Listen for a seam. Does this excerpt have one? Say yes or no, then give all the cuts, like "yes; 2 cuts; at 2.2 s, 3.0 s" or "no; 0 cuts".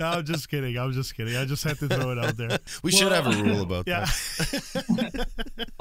yes; 1 cut; at 2.7 s